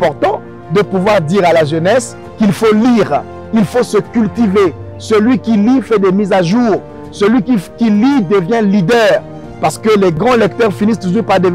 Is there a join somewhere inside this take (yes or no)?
no